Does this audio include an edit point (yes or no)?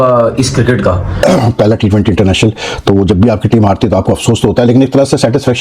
yes